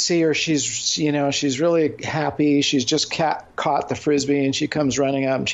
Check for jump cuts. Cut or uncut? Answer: uncut